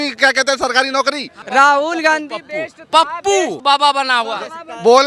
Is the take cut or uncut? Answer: cut